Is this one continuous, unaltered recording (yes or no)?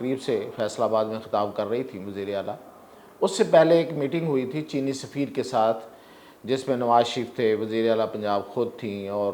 yes